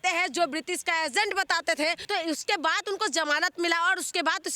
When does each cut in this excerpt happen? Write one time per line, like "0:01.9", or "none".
0:02.0